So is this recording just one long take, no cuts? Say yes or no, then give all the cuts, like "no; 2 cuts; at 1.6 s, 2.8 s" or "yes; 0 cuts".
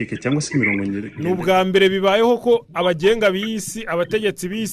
no; 1 cut; at 1.1 s